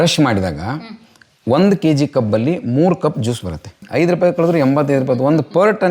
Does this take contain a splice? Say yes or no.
yes